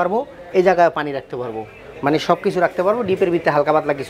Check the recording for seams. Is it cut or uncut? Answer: uncut